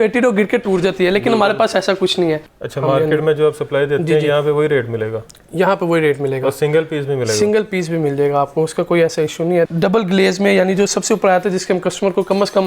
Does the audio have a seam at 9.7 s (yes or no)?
yes